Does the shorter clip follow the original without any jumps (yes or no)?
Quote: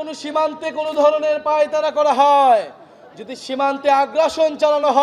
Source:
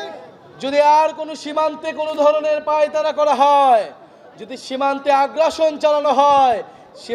yes